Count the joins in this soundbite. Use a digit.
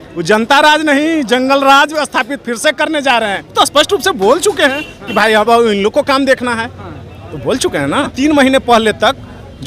2